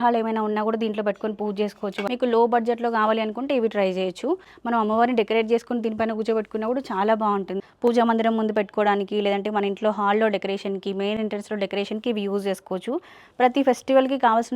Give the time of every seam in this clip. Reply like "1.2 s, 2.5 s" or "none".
2.0 s, 4.5 s, 7.5 s